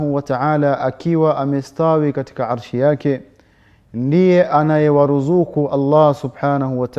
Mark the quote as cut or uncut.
uncut